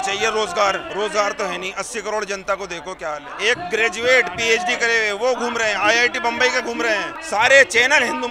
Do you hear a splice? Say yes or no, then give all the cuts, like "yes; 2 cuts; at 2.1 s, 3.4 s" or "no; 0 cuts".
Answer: yes; 3 cuts; at 0.9 s, 3.3 s, 7.2 s